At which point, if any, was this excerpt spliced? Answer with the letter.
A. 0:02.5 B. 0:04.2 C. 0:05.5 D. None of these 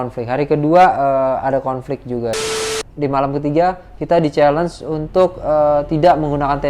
A